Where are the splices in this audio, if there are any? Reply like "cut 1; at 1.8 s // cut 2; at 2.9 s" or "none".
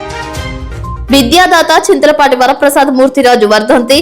cut 1; at 1.0 s